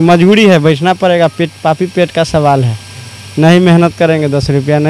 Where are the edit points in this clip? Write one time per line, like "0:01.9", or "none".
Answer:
none